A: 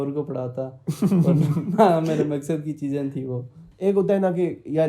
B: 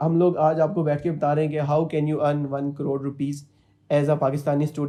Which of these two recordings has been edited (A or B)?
A